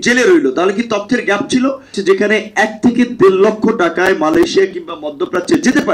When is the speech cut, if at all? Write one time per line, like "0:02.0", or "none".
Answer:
0:02.0